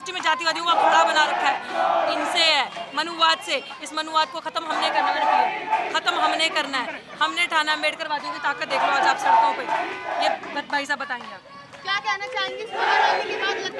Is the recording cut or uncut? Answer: uncut